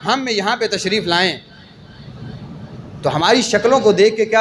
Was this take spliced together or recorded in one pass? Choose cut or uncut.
uncut